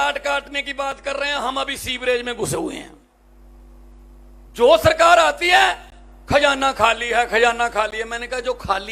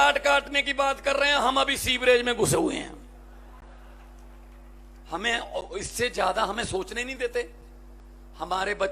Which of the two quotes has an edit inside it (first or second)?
first